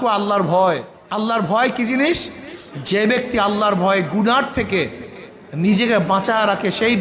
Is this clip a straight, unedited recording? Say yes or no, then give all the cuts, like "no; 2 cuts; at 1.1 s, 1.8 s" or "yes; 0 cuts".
no; 1 cut; at 1.0 s